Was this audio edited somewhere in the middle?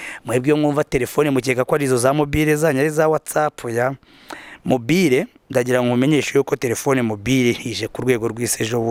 no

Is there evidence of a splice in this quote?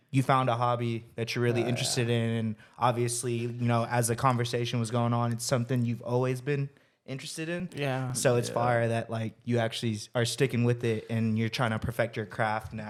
no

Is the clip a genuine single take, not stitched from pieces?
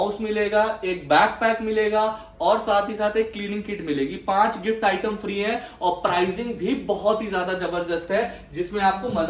yes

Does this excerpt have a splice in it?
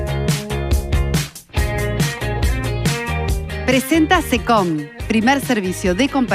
yes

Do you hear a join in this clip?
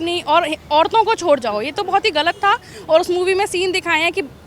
no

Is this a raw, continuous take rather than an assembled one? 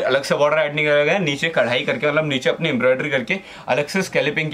yes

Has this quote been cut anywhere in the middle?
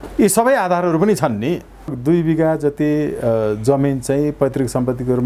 yes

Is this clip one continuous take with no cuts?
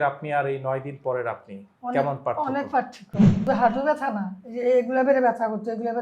no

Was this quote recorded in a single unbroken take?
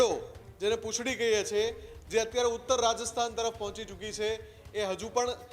yes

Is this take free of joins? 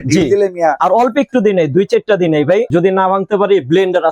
no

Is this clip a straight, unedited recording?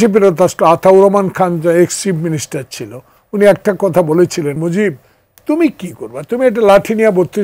no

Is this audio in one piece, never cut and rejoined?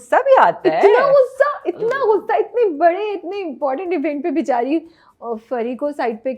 yes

